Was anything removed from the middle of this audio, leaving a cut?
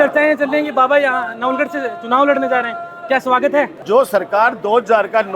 yes; 1 cut; at 3.8 s

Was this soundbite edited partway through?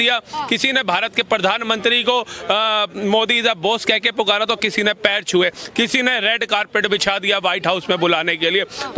no; 0 cuts

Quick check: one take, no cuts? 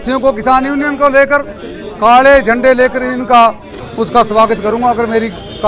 no; 1 cut; at 3.8 s

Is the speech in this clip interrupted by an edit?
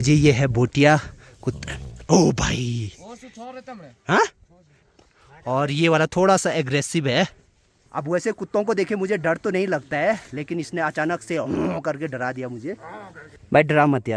no; 0 cuts

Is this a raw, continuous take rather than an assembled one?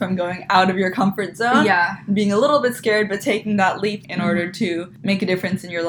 no; 2 cuts; at 4.0 s, 4.9 s

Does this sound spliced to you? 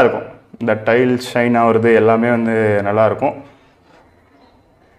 no; 0 cuts

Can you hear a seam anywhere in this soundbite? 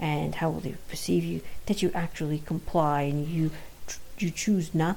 no; 0 cuts

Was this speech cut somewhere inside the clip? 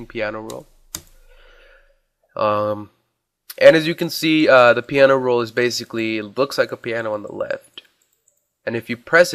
yes; 1 cut; at 7.8 s

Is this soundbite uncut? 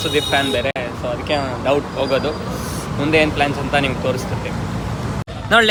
yes; 0 cuts

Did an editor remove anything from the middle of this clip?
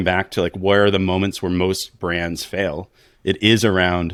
no; 0 cuts

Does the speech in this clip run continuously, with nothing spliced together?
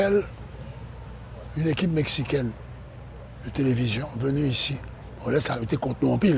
yes; 0 cuts

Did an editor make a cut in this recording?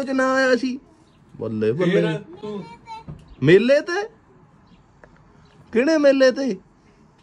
no; 0 cuts

